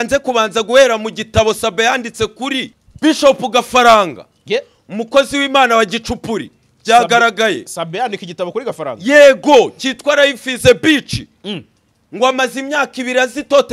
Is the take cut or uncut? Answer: cut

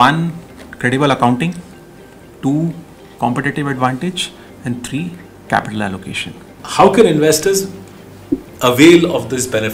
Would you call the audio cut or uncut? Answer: cut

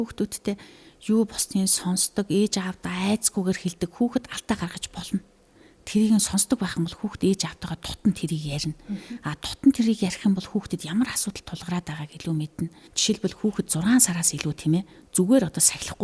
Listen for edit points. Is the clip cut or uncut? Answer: cut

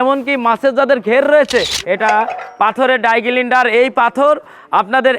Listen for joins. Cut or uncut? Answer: cut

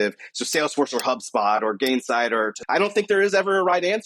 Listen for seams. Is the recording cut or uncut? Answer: cut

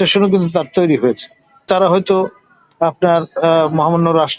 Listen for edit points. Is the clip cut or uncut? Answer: cut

